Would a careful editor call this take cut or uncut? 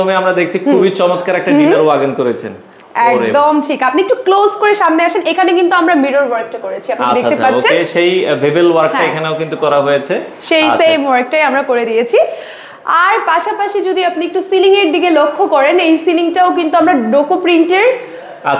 uncut